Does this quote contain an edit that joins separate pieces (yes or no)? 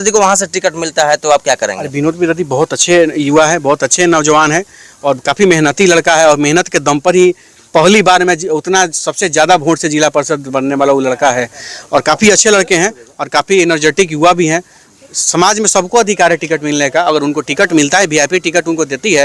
no